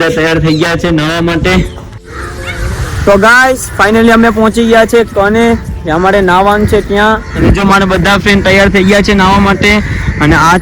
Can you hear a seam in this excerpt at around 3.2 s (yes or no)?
no